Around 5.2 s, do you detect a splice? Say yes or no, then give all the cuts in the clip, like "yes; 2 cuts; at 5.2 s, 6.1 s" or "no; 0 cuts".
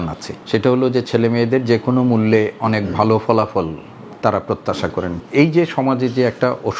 yes; 1 cut; at 5.2 s